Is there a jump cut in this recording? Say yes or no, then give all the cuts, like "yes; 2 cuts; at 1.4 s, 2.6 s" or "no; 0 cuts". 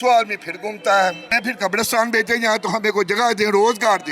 yes; 1 cut; at 1.3 s